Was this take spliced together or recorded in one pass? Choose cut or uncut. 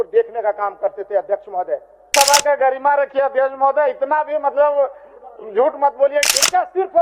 cut